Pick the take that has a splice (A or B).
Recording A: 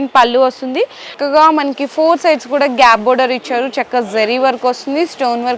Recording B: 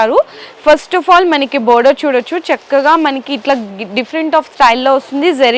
A